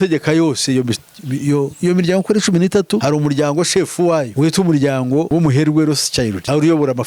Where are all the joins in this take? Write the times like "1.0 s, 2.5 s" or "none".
none